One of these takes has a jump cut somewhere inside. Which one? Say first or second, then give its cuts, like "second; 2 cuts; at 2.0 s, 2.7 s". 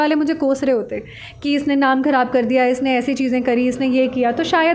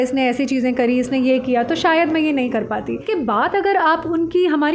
second; 1 cut; at 3.0 s